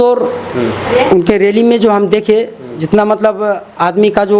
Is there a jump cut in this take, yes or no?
no